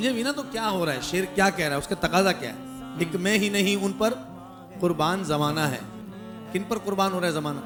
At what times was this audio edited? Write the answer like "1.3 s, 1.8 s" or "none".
none